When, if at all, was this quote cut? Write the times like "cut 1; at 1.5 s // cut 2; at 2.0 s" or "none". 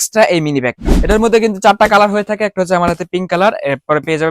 cut 1; at 0.9 s